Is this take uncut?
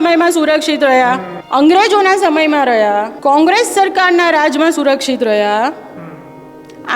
no; 2 cuts; at 1.3 s, 3.1 s

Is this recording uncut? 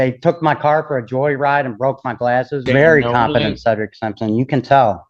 no; 1 cut; at 2.6 s

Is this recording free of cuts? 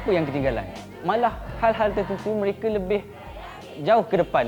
no; 1 cut; at 1.2 s

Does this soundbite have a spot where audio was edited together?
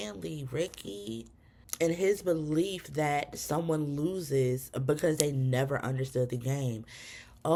no; 0 cuts

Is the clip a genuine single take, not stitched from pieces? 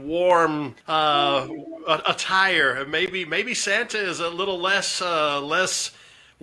yes; 0 cuts

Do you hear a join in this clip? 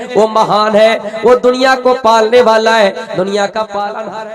no; 0 cuts

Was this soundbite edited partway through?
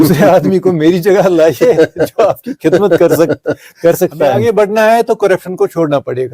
yes; 1 cut; at 4.4 s

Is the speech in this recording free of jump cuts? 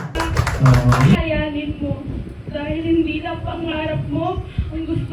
no; 1 cut; at 1.1 s

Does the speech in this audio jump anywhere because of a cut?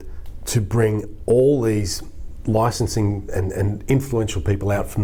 no; 0 cuts

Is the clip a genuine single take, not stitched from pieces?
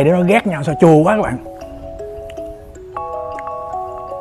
no; 1 cut; at 1.7 s

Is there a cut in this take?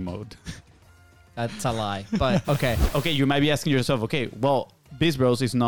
yes; 1 cut; at 2.8 s

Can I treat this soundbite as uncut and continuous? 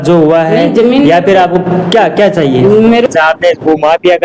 no; 1 cut; at 3.1 s

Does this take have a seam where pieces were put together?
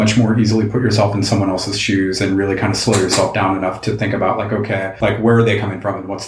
yes; 1 cut; at 4.9 s

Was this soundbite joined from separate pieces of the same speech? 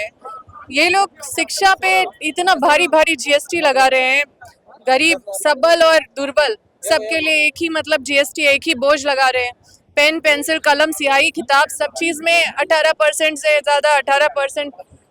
no; 0 cuts

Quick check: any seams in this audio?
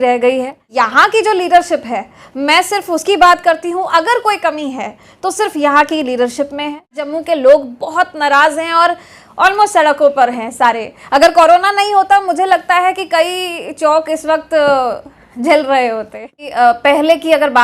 yes; 3 cuts; at 0.7 s, 7.1 s, 16.5 s

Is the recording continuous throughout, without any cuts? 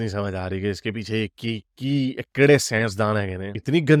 yes; 0 cuts

